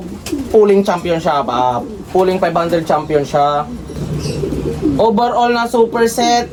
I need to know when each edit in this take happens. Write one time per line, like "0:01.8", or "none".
none